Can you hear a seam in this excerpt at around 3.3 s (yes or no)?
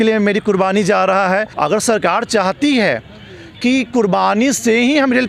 no